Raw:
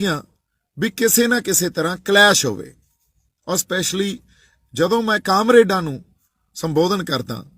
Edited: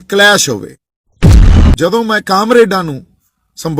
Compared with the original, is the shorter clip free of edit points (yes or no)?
no